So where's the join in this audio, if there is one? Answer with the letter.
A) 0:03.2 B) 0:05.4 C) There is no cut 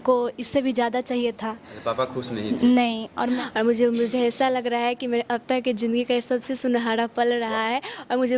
A